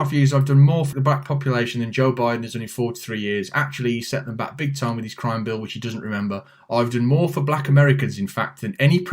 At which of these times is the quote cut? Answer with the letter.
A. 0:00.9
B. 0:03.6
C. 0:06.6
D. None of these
A